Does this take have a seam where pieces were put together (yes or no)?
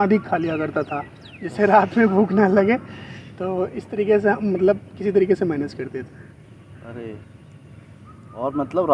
no